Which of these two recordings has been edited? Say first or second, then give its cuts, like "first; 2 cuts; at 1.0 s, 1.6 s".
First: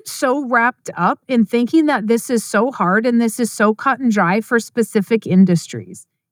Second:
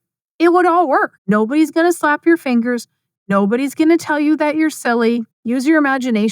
second; 2 cuts; at 1.2 s, 5.3 s